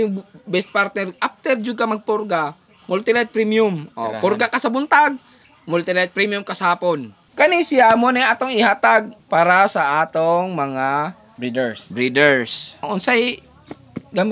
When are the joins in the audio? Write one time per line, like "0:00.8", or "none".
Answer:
0:07.2
0:09.2
0:12.8